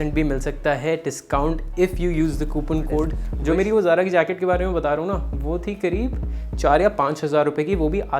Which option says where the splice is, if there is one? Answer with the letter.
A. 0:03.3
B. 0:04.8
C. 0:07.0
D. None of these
A